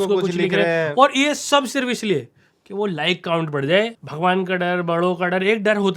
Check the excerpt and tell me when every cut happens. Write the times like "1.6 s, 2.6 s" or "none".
4.0 s